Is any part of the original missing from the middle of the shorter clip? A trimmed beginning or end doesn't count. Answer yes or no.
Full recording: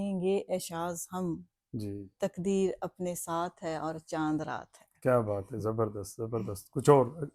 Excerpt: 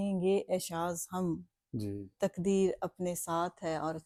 no